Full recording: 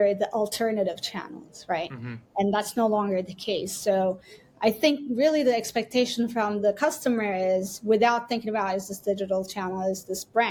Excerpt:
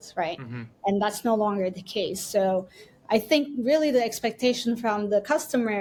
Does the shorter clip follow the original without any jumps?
yes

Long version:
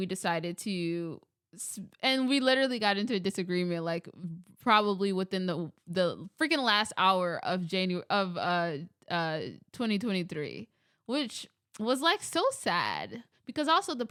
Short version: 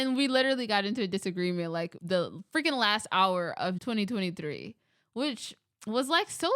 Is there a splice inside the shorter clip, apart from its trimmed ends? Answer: yes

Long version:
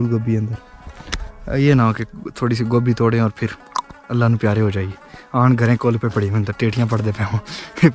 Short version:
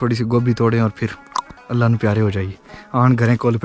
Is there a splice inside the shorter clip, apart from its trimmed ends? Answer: no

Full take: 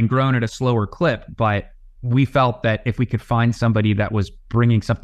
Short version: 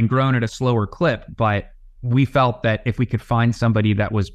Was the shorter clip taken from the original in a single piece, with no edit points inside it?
yes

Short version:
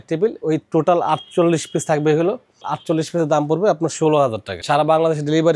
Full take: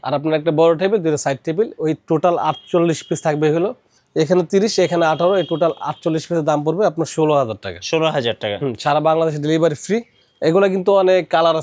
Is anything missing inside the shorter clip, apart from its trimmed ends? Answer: yes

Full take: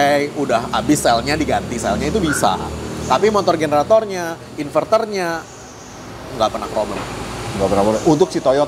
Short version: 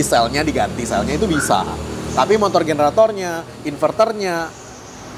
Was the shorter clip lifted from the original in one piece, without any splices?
yes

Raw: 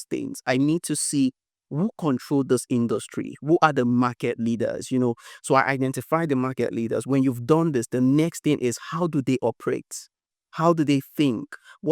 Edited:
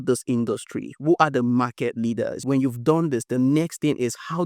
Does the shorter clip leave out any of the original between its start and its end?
yes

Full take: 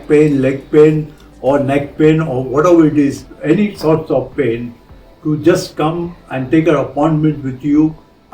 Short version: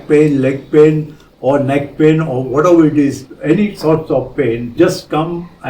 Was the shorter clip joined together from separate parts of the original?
yes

